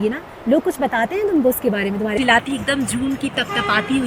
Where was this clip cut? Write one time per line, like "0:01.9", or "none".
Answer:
0:02.2